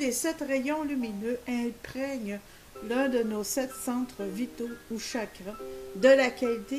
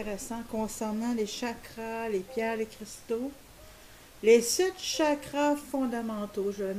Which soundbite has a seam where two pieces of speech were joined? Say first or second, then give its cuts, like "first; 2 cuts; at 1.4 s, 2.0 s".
first; 1 cut; at 3.5 s